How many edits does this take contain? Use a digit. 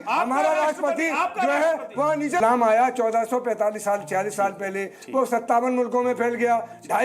1